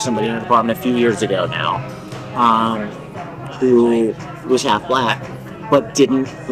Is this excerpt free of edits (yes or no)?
yes